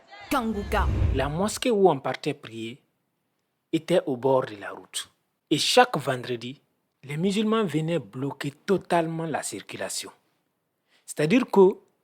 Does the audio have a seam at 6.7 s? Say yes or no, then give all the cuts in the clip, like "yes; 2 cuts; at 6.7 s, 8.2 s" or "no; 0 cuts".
no; 1 cut; at 1.0 s